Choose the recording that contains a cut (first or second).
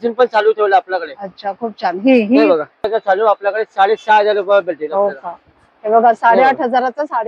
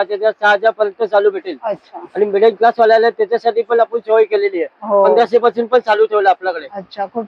first